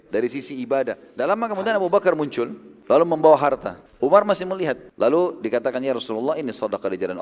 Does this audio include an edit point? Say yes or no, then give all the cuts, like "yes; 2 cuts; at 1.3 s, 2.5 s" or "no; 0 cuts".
yes; 4 cuts; at 1.1 s, 2.7 s, 3.8 s, 4.9 s